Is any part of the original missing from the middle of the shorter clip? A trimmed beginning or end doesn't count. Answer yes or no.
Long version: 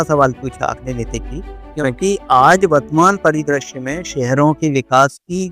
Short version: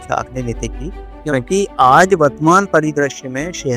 no